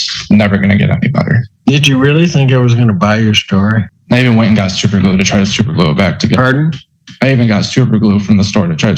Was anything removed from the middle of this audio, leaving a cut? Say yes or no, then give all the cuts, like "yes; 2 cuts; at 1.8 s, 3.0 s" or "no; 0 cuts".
yes; 2 cuts; at 1.5 s, 4.0 s